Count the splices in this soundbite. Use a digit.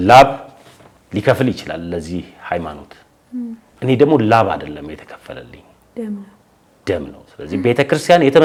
0